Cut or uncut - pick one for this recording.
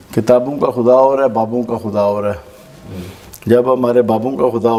uncut